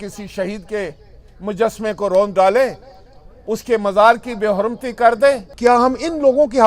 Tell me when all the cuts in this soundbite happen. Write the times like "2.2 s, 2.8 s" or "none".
5.5 s